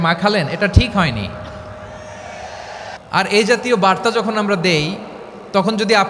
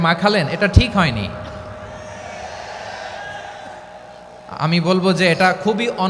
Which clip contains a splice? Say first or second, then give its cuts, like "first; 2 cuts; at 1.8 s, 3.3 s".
first; 1 cut; at 2.9 s